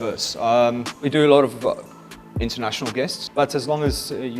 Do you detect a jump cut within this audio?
yes; 2 cuts; at 0.9 s, 3.2 s

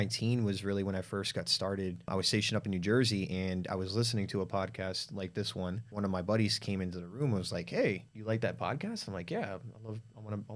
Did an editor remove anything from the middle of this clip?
yes; 3 cuts; at 2.1 s, 5.9 s, 8.1 s

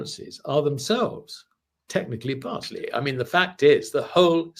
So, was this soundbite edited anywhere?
yes; 1 cut; at 2.7 s

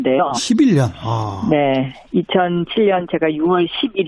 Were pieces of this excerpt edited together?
no; 0 cuts

